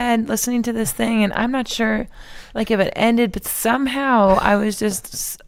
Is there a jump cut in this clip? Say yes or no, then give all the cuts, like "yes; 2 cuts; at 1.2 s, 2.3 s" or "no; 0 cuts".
no; 0 cuts